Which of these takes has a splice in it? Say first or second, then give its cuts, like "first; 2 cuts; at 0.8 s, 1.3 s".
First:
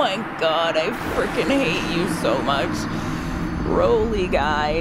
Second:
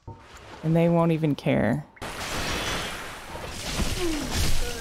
second; 1 cut; at 2.1 s